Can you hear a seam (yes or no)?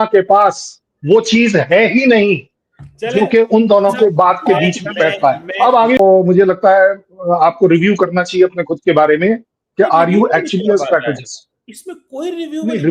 yes